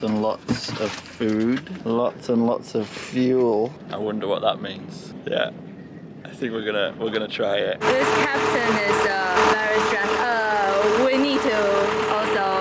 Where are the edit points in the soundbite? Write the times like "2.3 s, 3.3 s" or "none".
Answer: 1.7 s, 3.8 s, 5.1 s, 7.8 s, 9.4 s